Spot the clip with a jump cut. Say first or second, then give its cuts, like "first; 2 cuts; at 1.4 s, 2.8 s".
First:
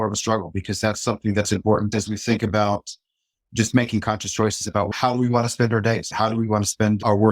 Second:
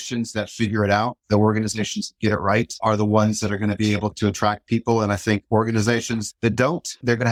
first; 3 cuts; at 1.9 s, 4.9 s, 6.1 s